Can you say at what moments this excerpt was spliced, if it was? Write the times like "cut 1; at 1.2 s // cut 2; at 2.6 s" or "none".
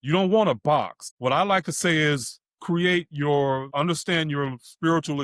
cut 1; at 1.0 s // cut 2; at 3.7 s

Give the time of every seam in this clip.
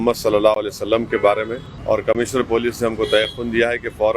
cut 1; at 1.7 s

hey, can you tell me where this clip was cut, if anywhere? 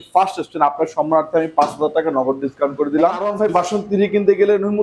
cut 1; at 3.3 s

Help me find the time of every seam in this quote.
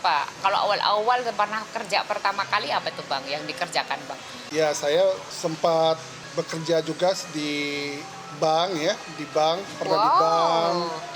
cut 1; at 4.4 s

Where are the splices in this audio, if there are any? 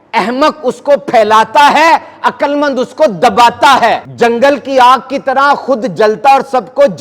cut 1; at 4.1 s

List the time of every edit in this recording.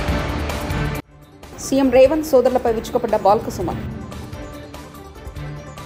cut 1; at 1.0 s

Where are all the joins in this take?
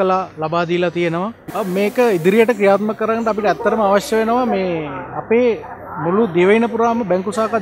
cut 1; at 1.4 s

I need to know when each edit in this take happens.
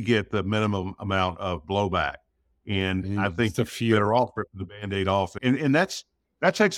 none

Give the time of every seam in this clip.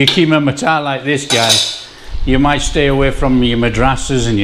none

